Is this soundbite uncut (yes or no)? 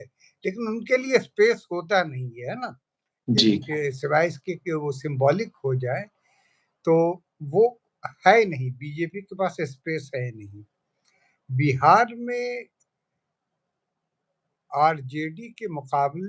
yes